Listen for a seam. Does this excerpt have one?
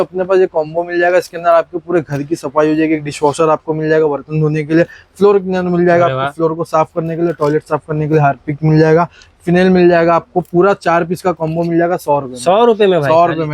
no; 0 cuts

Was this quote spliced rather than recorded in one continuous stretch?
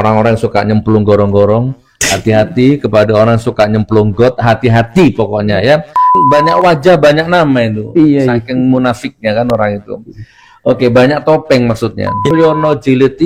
yes; 2 cuts; at 6.1 s, 12.3 s

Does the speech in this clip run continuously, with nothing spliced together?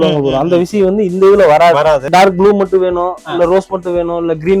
no; 1 cut; at 2.1 s

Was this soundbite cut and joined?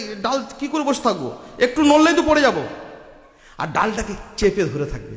no; 0 cuts

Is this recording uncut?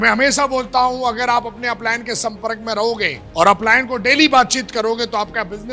no; 1 cut; at 3.2 s

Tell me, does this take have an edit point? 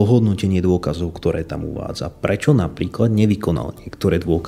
no; 0 cuts

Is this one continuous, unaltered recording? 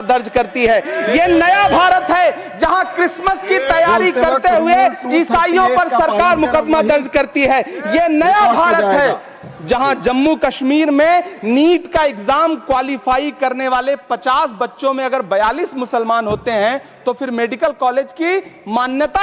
yes; 0 cuts

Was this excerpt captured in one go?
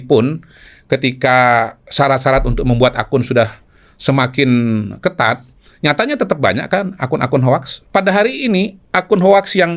yes; 0 cuts

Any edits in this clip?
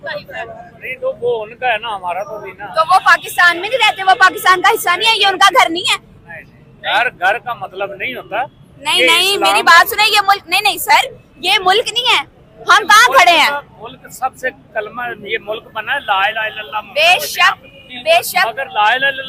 no; 0 cuts

